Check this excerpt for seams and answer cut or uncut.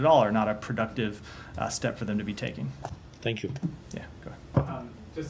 uncut